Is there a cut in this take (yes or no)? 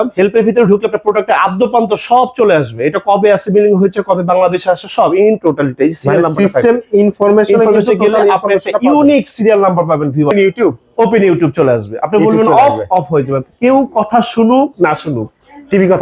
yes